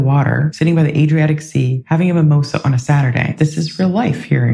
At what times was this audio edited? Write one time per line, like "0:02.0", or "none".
0:01.8
0:03.3